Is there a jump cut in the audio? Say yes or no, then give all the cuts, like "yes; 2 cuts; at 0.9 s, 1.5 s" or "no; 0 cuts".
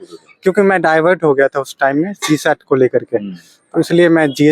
no; 0 cuts